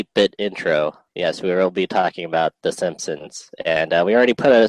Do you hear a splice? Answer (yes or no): no